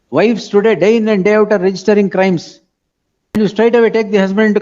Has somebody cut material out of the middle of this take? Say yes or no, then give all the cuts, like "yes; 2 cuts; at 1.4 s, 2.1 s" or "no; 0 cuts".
yes; 1 cut; at 3.6 s